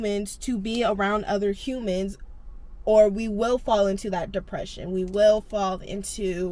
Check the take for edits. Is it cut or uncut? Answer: uncut